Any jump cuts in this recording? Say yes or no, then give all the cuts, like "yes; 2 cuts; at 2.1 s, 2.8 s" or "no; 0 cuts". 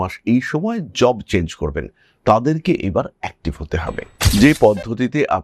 no; 0 cuts